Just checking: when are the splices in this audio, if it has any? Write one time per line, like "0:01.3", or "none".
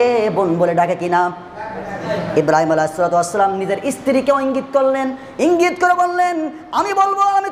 0:02.0